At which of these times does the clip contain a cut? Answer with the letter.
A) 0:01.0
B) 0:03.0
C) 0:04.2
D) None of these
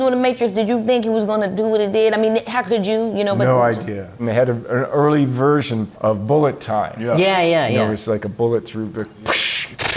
C